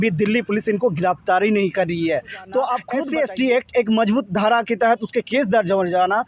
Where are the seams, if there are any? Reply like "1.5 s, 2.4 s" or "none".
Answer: 2.9 s